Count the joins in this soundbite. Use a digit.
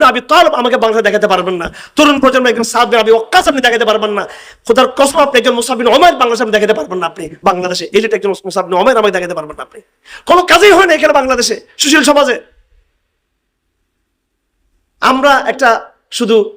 0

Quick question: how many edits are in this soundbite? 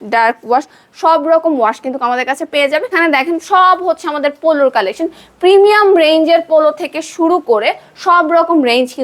1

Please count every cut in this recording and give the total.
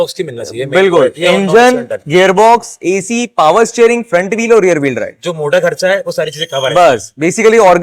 0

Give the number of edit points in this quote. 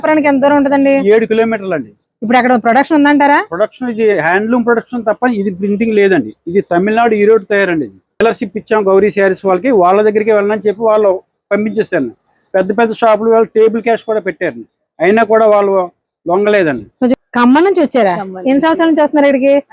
2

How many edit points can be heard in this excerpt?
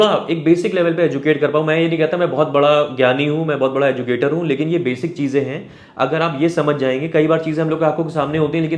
0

